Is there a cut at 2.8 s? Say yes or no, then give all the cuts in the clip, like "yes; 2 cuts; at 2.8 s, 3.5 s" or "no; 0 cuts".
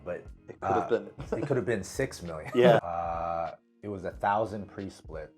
yes; 1 cut; at 2.8 s